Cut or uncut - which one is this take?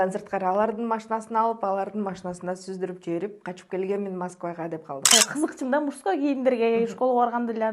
cut